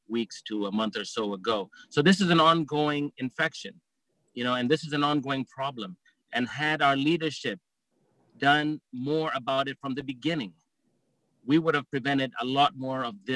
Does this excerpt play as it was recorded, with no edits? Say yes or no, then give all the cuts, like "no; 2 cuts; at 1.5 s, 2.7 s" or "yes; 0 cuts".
yes; 0 cuts